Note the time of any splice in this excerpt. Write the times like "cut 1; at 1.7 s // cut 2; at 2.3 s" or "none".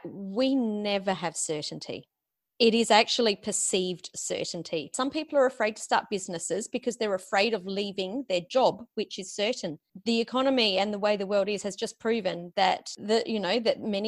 cut 1; at 4.9 s